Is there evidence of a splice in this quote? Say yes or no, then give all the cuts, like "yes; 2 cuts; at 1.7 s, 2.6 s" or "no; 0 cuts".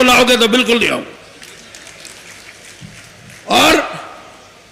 no; 0 cuts